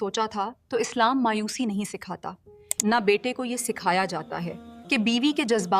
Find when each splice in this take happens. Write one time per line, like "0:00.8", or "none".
0:02.6